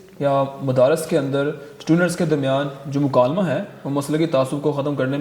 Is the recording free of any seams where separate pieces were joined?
yes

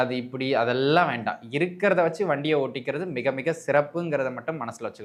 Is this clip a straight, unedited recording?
yes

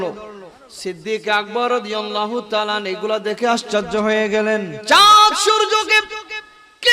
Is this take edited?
yes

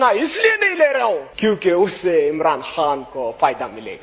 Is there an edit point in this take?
yes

